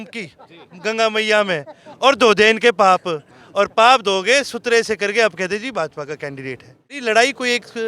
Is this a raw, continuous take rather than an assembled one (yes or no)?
no